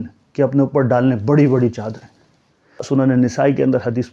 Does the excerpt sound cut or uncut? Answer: cut